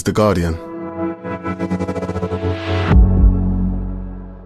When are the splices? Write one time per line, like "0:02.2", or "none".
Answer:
none